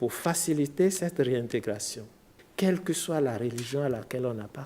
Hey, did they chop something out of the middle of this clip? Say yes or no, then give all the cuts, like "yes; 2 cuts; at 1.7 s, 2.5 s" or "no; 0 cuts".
yes; 1 cut; at 2.4 s